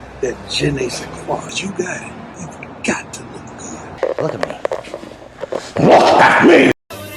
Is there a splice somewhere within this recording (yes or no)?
yes